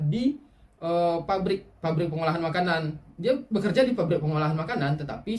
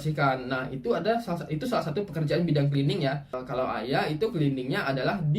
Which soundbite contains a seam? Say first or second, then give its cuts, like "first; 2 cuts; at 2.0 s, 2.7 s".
second; 1 cut; at 3.4 s